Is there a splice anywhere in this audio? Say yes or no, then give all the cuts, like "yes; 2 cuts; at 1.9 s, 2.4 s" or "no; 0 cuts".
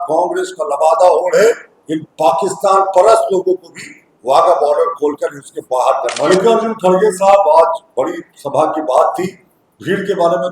yes; 1 cut; at 6.2 s